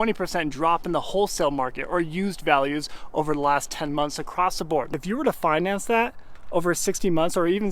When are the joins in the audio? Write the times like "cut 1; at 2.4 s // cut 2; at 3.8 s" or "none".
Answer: cut 1; at 4.9 s